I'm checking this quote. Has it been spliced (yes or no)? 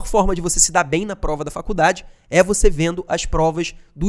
no